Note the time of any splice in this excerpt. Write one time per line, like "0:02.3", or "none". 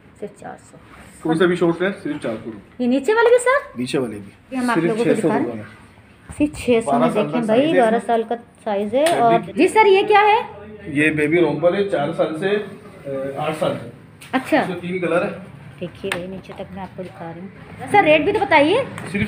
0:04.6
0:09.5
0:17.9